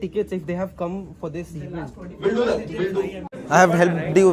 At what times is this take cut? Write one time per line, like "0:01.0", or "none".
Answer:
0:03.3